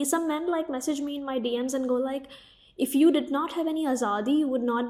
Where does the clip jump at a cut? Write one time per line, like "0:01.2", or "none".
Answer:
none